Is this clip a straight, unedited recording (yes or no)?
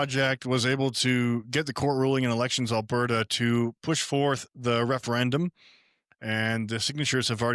yes